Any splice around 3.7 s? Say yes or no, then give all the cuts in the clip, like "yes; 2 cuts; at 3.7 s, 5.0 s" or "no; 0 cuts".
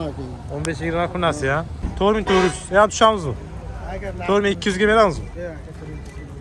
no; 1 cut; at 1.8 s